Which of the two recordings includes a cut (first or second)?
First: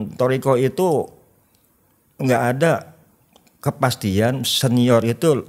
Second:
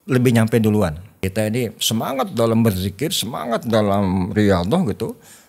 second